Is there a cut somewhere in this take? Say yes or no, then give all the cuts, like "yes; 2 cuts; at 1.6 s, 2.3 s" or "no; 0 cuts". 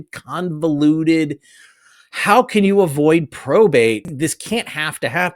yes; 1 cut; at 4.1 s